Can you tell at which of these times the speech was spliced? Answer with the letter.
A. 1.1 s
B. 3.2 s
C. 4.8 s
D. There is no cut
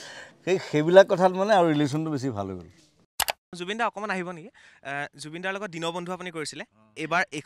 B